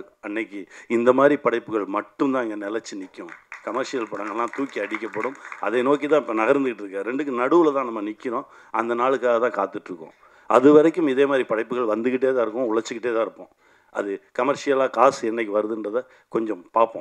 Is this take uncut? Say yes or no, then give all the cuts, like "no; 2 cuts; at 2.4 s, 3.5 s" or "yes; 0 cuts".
yes; 0 cuts